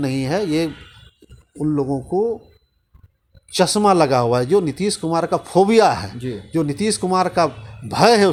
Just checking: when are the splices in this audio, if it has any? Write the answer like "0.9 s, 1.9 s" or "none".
none